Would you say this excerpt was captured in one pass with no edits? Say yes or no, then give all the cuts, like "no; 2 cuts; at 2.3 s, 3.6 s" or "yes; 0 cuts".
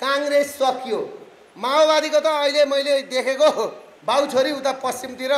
no; 1 cut; at 3.9 s